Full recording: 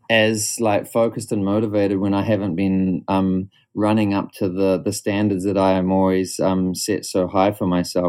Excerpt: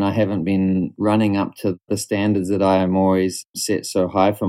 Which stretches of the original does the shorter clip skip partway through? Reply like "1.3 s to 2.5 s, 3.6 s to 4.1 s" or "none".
3.0 s to 3.7 s, 4.6 s to 4.8 s, 6.4 s to 6.6 s